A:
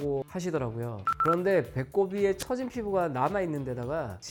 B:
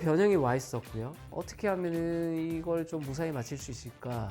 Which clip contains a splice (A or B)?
B